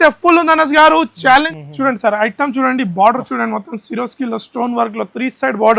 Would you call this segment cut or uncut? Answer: cut